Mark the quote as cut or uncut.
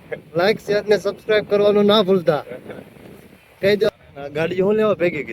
cut